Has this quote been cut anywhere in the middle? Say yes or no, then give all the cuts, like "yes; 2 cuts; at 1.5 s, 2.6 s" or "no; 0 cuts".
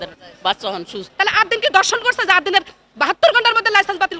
yes; 1 cut; at 1.0 s